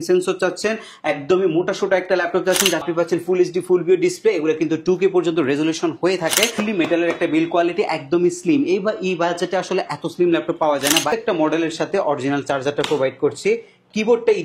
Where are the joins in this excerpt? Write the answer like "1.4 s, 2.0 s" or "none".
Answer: 2.8 s, 6.6 s, 11.1 s